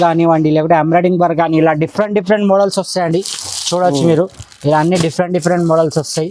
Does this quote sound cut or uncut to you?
uncut